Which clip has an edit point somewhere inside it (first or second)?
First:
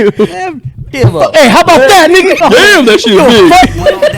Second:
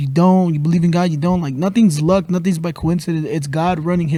first